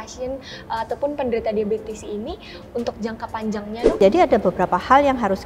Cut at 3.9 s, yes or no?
yes